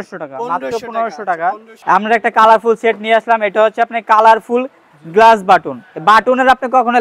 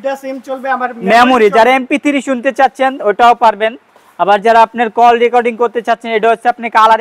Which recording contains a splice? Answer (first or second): first